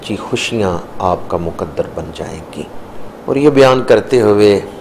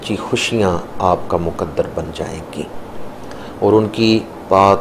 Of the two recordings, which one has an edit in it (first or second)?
first